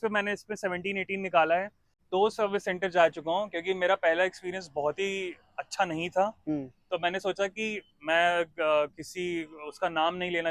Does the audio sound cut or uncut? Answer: cut